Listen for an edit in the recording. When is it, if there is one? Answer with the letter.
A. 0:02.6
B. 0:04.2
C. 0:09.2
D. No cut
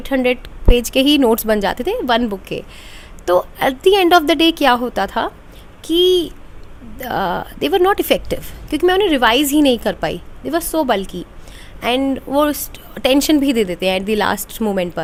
D